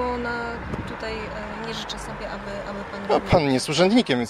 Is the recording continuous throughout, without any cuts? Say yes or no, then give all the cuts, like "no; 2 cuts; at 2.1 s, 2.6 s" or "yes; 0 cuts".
yes; 0 cuts